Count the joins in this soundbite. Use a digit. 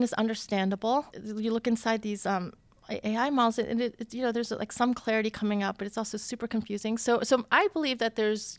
1